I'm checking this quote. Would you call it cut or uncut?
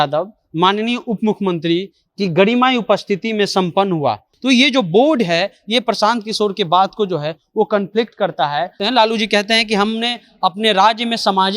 cut